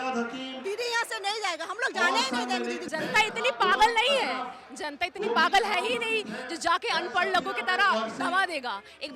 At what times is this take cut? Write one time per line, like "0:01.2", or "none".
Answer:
0:02.8